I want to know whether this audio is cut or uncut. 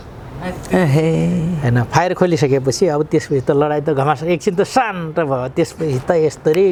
uncut